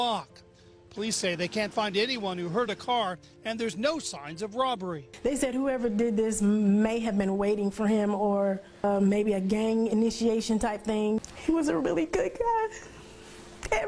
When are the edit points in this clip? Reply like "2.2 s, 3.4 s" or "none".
11.2 s